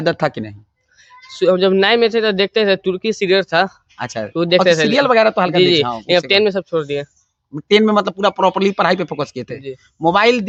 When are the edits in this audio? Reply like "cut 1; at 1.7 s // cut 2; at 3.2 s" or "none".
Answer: none